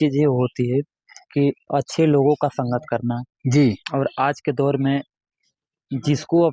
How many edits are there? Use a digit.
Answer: 0